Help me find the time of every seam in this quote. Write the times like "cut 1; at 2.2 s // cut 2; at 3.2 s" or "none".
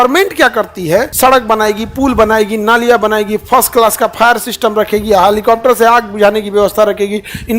cut 1; at 1.1 s